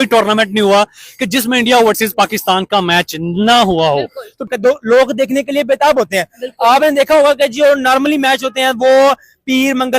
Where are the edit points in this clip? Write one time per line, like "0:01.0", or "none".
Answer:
0:04.5